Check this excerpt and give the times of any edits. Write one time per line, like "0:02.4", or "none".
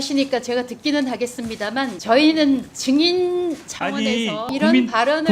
0:02.0
0:02.7
0:04.5